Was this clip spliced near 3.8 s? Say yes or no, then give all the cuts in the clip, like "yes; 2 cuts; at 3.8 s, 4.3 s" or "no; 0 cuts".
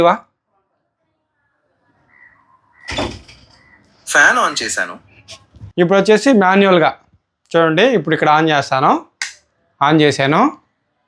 no; 1 cut; at 5.5 s